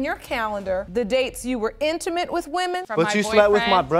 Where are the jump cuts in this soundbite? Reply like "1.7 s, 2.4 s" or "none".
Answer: 2.8 s